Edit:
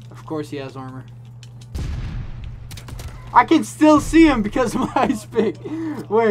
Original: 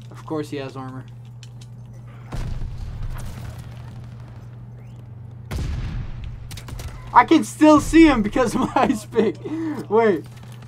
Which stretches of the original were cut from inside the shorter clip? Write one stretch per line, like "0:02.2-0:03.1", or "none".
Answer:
0:01.8-0:05.6